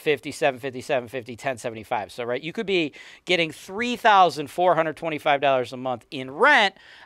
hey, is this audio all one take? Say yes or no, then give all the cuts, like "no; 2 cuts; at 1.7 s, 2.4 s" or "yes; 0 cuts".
yes; 0 cuts